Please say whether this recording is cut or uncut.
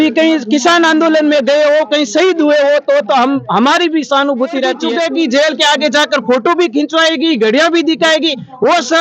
cut